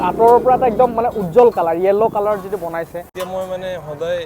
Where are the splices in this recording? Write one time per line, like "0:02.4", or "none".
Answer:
0:03.1

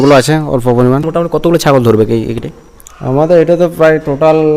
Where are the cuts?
0:01.1

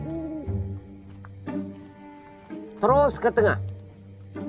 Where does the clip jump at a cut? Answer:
0:02.7

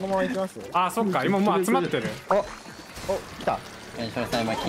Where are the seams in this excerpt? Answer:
0:02.2
0:03.8

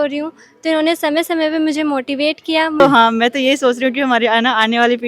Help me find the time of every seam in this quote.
0:02.8

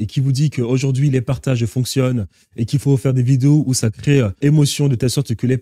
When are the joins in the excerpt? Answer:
0:04.4

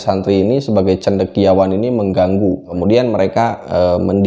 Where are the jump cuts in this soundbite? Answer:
0:02.7

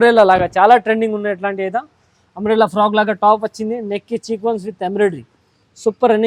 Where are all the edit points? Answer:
none

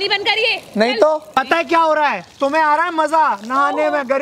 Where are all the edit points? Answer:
0:01.3

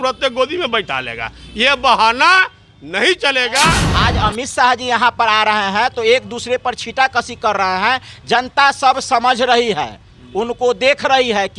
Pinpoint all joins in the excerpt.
0:03.9

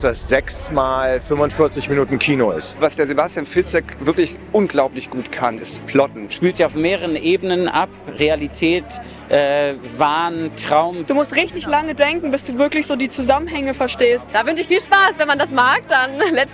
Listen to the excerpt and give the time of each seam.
0:02.7
0:06.2
0:11.0
0:14.3

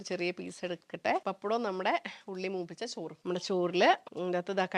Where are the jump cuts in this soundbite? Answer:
0:03.2

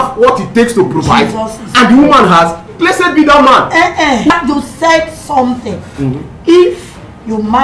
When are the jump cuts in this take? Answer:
0:02.6
0:04.3

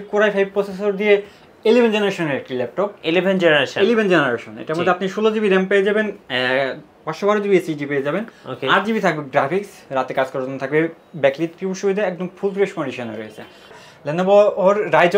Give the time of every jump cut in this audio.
0:13.6

